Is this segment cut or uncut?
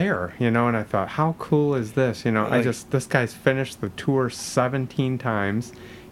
uncut